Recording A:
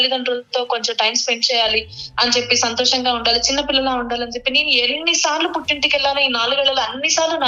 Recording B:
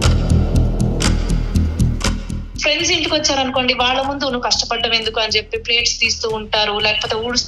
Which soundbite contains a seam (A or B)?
B